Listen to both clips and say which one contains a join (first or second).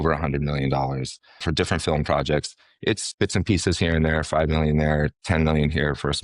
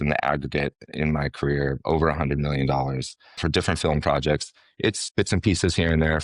first